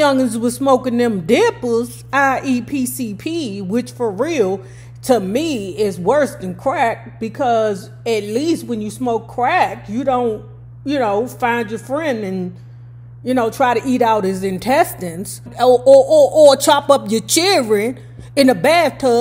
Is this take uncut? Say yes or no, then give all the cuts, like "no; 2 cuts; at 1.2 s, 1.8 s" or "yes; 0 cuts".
yes; 0 cuts